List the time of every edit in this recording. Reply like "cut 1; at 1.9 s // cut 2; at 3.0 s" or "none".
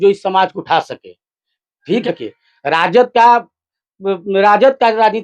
cut 1; at 2.0 s

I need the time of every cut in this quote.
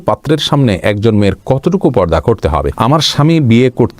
cut 1; at 2.7 s

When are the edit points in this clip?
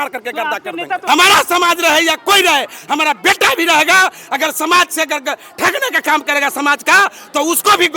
cut 1; at 1.0 s

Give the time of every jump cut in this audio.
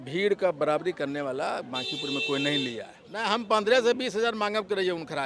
cut 1; at 3.0 s

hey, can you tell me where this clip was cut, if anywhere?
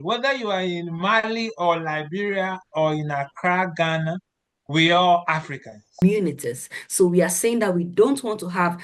cut 1; at 6.0 s

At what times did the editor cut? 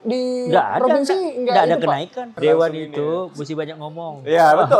cut 1; at 2.3 s

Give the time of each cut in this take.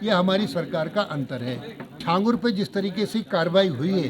cut 1; at 2.0 s

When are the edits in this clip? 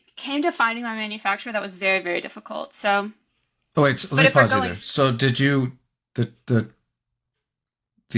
none

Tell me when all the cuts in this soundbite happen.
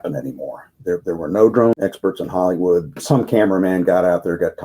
cut 1; at 1.7 s // cut 2; at 3.0 s

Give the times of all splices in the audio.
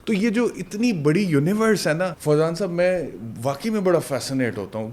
cut 1; at 2.2 s

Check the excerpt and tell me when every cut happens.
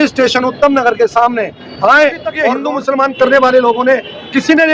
cut 1; at 2.5 s

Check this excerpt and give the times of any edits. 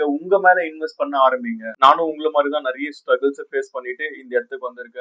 cut 1; at 1.6 s

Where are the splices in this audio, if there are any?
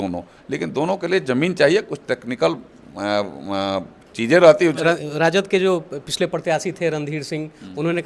cut 1; at 4.8 s

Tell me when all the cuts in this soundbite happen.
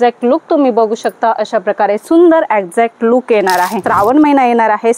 cut 1; at 3.8 s

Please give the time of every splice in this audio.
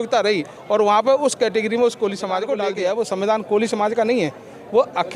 cut 1; at 2.6 s

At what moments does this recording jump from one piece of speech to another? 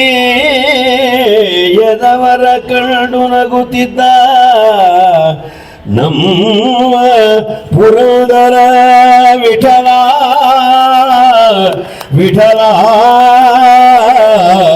none

